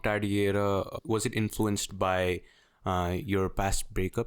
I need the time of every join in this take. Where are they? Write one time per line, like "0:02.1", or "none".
0:00.9